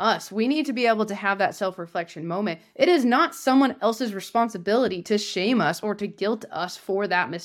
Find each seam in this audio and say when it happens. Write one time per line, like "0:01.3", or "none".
none